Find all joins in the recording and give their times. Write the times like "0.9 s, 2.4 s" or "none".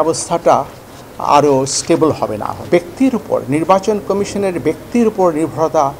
2.7 s